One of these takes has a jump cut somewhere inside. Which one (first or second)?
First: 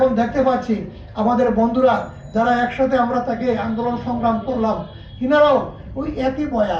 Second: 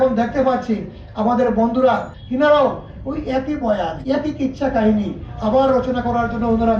second